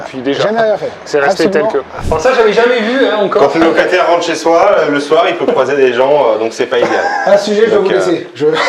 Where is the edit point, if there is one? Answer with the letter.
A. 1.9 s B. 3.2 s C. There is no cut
A